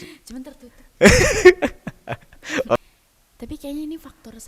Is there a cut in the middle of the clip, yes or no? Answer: yes